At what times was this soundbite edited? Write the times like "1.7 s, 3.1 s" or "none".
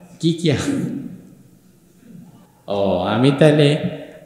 2.5 s